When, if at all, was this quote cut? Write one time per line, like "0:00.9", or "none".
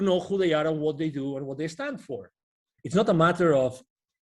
0:02.7

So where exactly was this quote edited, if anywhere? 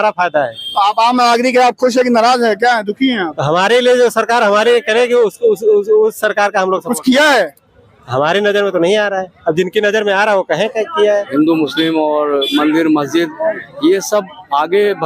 0:11.3

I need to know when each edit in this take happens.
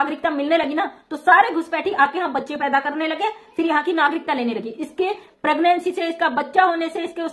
none

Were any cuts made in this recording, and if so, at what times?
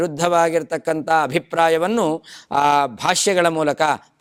none

